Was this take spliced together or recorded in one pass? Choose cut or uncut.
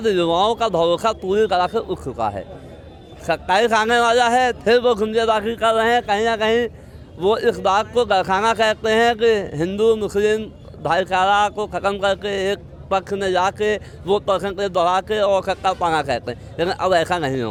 uncut